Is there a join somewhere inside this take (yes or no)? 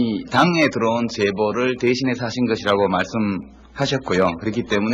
no